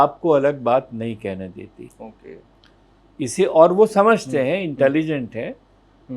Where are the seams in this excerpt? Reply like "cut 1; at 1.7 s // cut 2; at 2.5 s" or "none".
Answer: cut 1; at 1.9 s